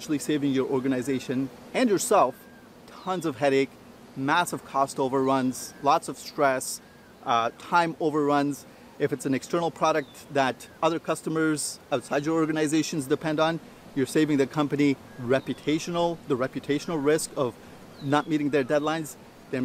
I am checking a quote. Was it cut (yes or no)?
no